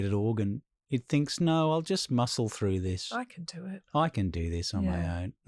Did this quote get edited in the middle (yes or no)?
no